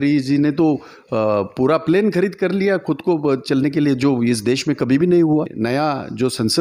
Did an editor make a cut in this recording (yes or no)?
yes